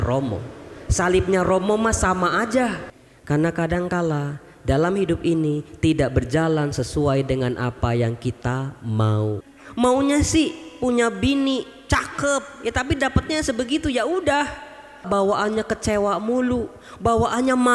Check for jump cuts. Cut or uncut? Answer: cut